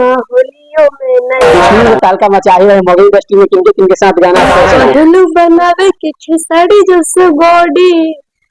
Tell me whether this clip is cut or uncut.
cut